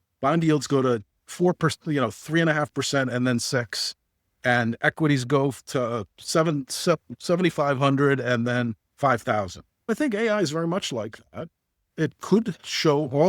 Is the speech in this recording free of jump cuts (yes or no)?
no